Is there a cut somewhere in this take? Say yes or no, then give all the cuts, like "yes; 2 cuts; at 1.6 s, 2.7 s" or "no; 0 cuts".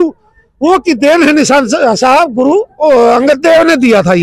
no; 0 cuts